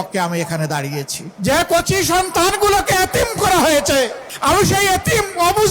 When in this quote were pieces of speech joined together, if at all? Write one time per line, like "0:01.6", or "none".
0:01.2
0:04.3